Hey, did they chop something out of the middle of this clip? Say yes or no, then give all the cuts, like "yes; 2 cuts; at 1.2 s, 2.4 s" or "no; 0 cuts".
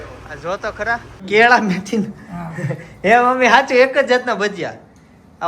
yes; 1 cut; at 1.1 s